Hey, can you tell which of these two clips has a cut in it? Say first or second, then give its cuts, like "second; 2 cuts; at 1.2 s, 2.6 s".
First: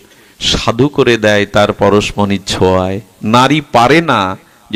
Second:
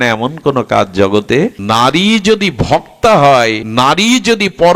second; 2 cuts; at 1.6 s, 3.6 s